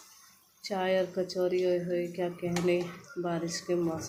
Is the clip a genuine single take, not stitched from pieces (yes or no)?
yes